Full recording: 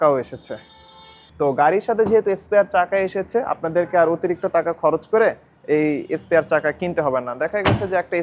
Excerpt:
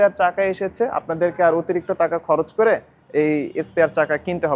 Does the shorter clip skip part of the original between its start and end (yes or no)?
no